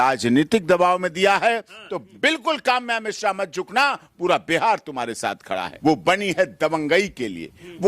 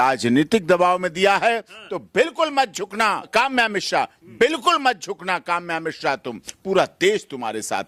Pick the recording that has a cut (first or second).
first